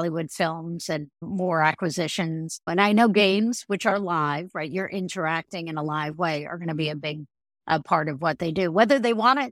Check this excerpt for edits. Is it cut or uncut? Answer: cut